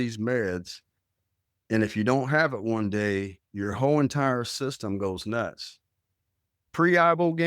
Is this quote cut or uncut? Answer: cut